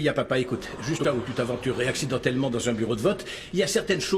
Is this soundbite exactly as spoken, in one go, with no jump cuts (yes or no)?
no